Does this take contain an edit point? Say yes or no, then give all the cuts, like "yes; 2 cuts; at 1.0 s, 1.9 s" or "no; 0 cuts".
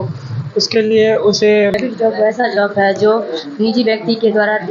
yes; 1 cut; at 1.7 s